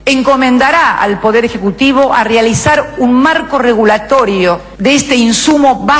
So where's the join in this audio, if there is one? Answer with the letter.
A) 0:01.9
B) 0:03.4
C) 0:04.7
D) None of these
D